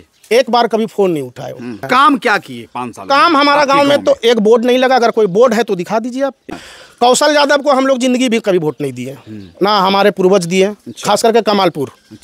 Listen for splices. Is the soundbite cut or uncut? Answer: cut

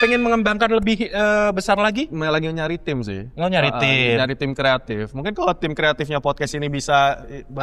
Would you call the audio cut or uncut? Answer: uncut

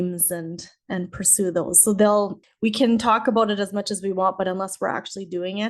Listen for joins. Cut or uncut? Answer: cut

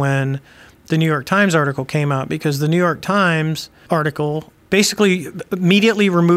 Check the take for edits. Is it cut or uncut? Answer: cut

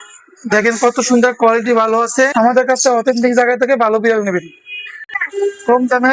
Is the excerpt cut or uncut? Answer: cut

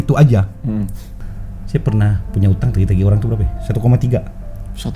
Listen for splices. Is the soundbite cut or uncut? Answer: cut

